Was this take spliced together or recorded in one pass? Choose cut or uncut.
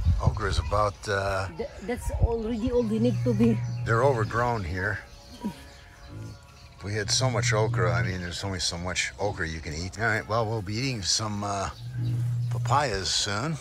uncut